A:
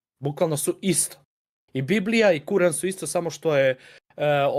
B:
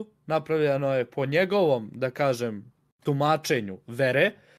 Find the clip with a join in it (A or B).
B